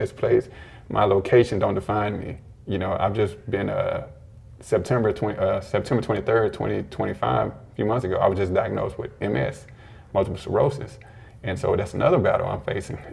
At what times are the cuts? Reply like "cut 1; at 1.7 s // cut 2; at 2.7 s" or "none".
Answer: none